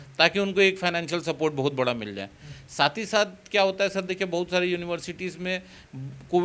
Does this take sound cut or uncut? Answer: uncut